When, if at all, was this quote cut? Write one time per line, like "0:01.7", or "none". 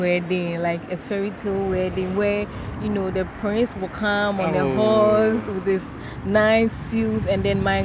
none

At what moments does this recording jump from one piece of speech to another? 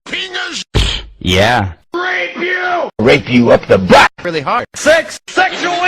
0:03.2

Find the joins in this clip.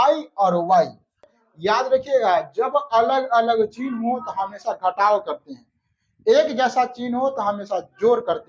0:01.4

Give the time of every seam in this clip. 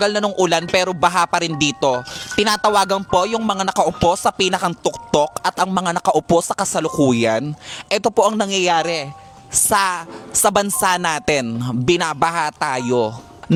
none

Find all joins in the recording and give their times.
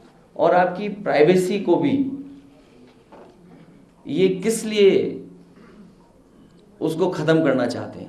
none

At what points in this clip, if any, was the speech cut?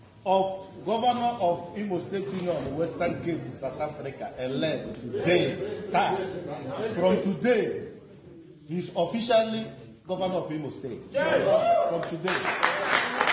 none

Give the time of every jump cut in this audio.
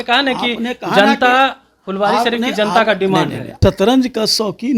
0:03.4

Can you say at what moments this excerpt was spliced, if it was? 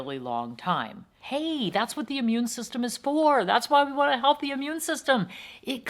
0:01.2

